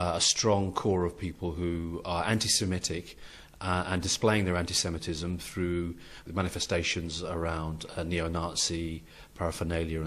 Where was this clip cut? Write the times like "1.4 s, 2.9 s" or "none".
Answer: 6.3 s